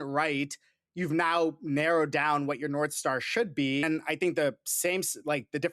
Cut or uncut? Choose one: cut